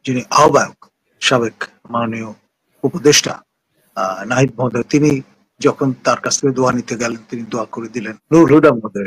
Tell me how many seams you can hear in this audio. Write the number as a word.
one